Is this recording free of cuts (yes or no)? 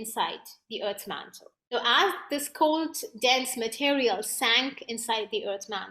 yes